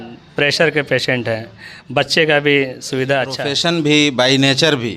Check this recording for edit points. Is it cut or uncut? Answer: cut